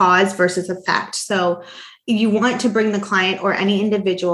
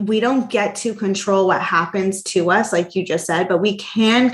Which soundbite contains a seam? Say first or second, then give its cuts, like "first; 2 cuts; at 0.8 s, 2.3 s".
first; 1 cut; at 1.9 s